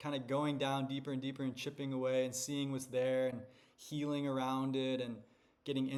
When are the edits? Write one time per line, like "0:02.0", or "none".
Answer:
none